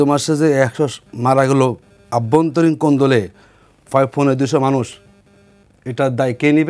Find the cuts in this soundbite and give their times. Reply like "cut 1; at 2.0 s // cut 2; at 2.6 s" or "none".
none